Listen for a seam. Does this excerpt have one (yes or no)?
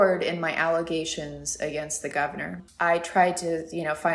yes